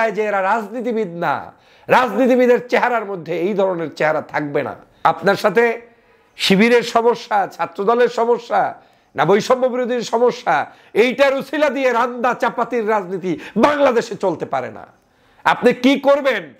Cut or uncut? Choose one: cut